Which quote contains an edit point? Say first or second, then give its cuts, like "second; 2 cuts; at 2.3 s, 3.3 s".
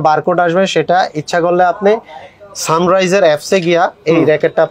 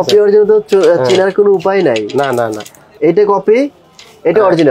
second; 1 cut; at 2.9 s